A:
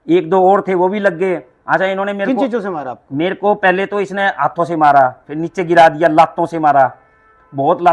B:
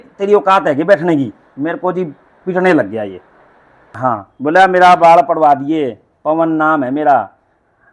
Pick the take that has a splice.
B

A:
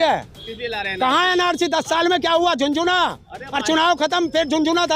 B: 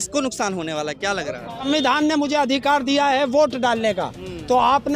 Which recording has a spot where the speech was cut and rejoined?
B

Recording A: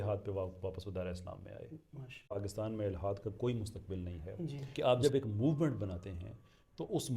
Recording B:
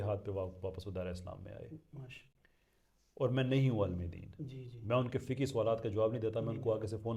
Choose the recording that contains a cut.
A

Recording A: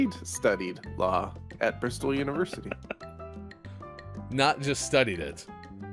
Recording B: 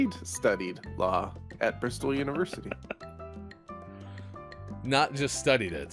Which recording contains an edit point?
A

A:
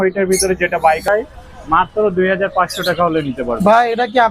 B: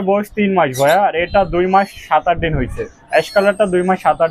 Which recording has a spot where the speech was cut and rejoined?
A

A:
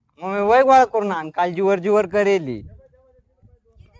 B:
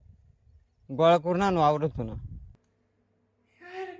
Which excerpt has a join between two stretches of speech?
B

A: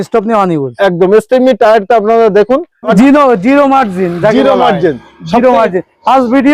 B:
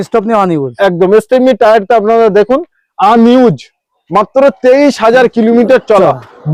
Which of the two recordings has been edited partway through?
A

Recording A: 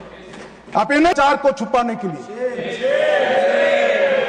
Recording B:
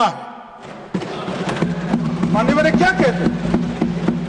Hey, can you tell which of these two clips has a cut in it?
A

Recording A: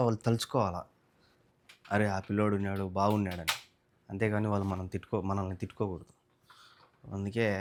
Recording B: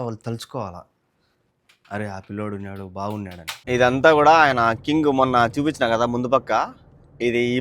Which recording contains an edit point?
B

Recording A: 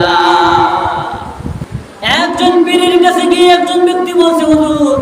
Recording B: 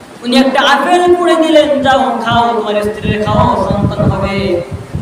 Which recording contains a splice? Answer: A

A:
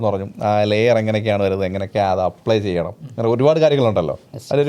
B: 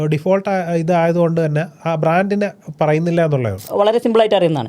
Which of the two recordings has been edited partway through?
B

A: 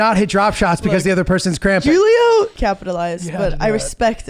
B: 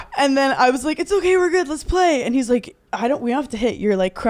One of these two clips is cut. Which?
A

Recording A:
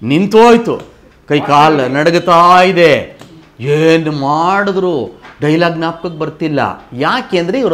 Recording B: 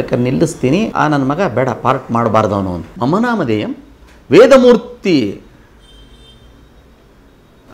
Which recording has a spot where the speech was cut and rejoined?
B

